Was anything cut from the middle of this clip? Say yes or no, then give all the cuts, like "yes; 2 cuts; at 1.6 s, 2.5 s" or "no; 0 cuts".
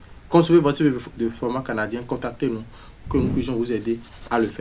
yes; 1 cut; at 1.1 s